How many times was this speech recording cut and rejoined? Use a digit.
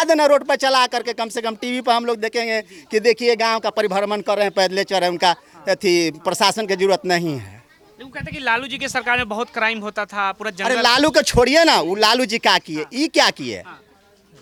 0